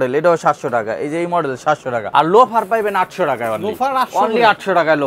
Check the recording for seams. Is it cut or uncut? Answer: cut